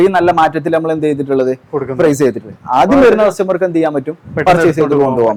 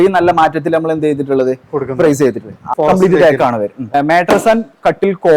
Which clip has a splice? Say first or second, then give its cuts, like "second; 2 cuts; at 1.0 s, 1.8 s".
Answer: second; 2 cuts; at 2.6 s, 3.9 s